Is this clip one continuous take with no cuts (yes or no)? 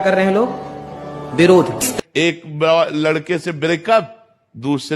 no